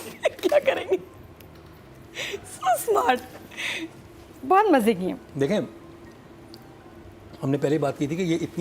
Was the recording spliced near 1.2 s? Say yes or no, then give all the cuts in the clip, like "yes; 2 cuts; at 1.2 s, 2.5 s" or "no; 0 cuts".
no; 0 cuts